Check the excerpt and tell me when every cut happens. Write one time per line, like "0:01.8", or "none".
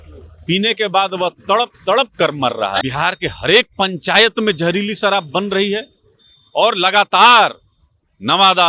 0:02.8